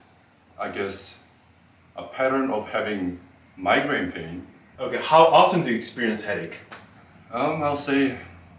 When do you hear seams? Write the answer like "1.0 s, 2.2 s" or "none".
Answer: 4.6 s